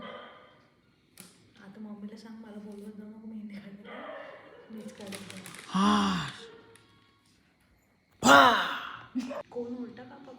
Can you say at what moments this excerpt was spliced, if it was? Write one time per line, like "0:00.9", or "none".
0:09.4